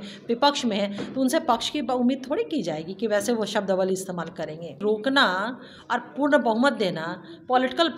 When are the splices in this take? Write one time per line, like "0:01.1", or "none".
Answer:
0:04.8